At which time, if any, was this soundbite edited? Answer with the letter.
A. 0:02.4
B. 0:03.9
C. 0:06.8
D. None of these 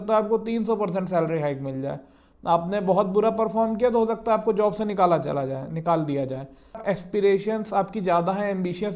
C